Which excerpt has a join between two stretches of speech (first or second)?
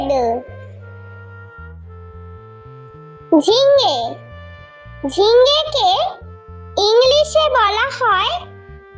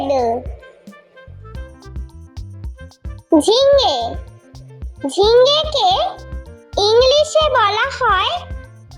second